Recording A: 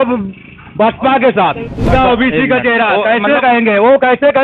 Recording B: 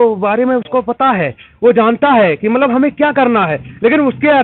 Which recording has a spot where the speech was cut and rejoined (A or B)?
A